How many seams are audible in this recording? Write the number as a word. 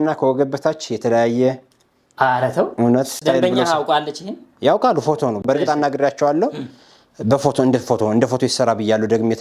zero